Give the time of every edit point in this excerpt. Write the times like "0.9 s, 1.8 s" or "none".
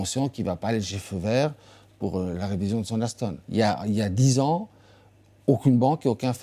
3.4 s